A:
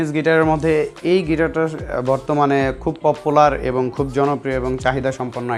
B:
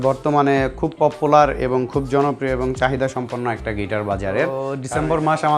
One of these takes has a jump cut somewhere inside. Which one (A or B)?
B